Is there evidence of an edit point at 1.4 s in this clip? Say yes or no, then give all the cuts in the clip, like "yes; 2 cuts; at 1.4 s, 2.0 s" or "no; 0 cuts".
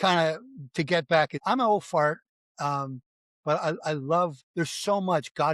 yes; 2 cuts; at 1.4 s, 4.4 s